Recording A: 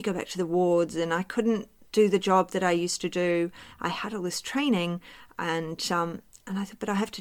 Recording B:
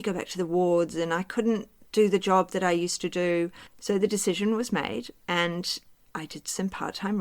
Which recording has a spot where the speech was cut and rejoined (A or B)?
B